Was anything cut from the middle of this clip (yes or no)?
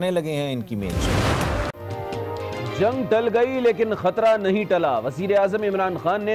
yes